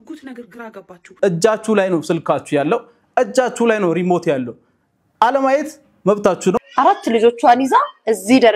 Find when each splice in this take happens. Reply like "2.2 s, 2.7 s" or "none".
1.1 s, 6.6 s